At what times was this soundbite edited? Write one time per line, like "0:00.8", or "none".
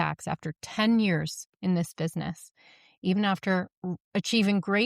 none